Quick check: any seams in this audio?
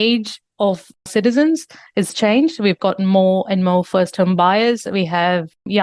yes; 1 cut; at 1.0 s

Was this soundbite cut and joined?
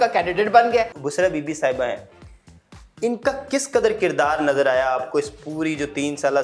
yes; 1 cut; at 0.9 s

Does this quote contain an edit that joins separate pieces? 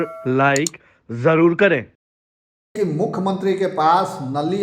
yes; 1 cut; at 2.8 s

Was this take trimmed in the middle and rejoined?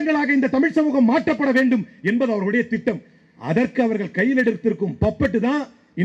no; 0 cuts

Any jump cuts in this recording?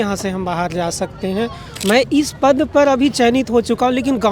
yes; 1 cut; at 1.7 s

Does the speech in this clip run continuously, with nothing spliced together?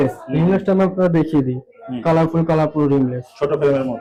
yes; 0 cuts

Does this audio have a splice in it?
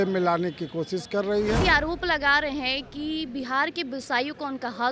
yes; 1 cut; at 1.6 s

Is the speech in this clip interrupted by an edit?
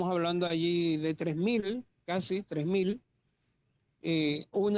no; 0 cuts

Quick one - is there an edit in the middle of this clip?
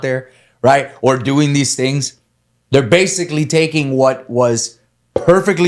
no; 0 cuts

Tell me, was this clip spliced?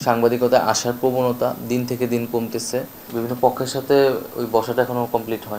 yes; 1 cut; at 3.1 s

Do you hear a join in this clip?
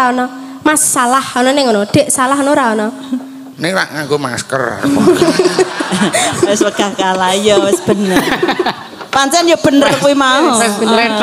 no; 0 cuts

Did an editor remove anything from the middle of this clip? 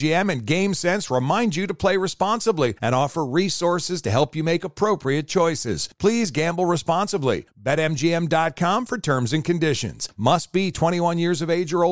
no; 0 cuts

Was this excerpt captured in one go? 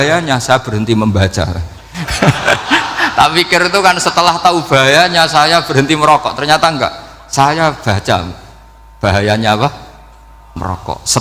yes; 0 cuts

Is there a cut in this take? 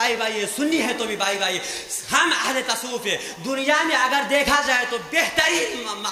no; 0 cuts

